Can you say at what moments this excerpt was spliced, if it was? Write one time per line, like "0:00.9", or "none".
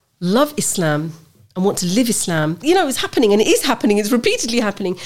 0:02.6